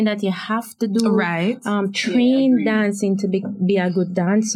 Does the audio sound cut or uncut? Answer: uncut